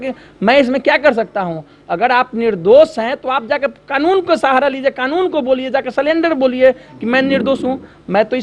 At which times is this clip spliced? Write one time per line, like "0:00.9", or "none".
none